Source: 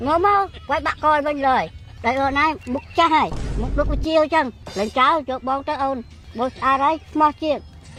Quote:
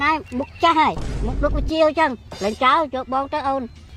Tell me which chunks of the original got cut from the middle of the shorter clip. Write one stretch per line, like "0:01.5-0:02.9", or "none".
none